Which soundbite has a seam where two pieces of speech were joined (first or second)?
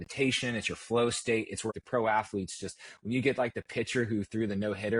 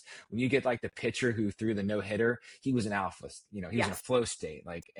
first